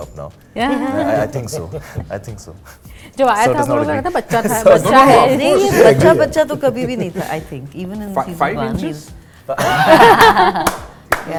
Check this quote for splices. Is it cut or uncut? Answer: uncut